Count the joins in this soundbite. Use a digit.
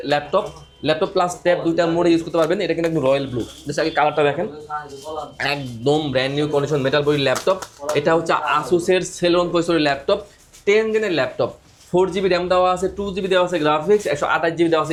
0